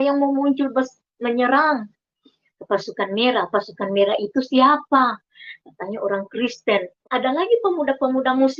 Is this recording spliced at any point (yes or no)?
yes